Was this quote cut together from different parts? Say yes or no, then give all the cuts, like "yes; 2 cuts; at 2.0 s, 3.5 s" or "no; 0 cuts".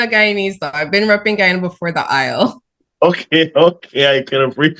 no; 0 cuts